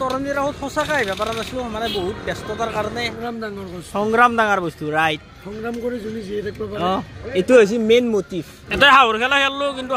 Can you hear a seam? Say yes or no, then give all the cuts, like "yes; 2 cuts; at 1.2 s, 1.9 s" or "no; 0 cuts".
yes; 2 cuts; at 3.2 s, 8.6 s